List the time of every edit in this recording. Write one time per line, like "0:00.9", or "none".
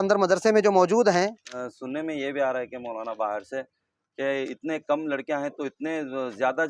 0:01.5